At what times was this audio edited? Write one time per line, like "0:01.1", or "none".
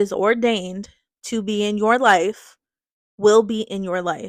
none